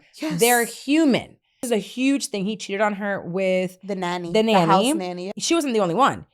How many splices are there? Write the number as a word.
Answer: two